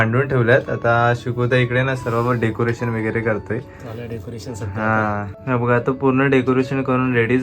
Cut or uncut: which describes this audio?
cut